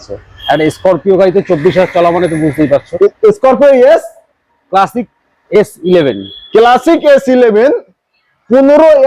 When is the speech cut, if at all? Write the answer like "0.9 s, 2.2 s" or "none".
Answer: none